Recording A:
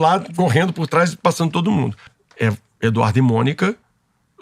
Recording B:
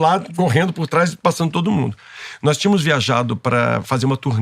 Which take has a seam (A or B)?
A